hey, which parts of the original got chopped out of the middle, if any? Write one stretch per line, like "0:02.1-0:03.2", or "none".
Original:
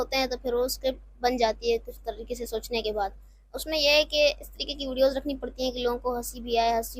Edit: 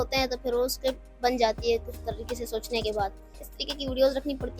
0:03.5-0:04.5